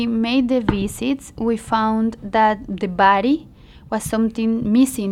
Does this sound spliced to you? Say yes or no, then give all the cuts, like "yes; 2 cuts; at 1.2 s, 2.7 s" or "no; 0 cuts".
no; 0 cuts